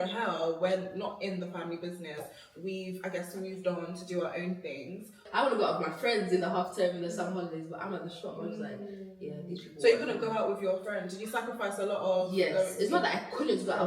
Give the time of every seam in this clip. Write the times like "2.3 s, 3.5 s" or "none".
5.2 s